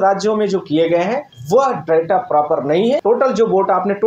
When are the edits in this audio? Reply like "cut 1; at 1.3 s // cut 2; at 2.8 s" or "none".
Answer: cut 1; at 1.3 s // cut 2; at 3.0 s